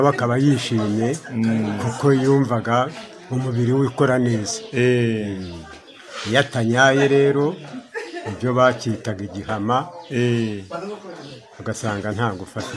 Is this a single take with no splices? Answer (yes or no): yes